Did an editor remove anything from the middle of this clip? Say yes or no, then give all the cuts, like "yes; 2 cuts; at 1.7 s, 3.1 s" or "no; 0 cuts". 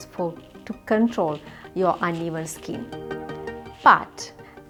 no; 0 cuts